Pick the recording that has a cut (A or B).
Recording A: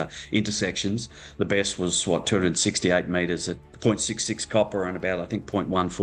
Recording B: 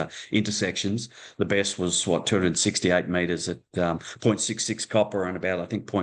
A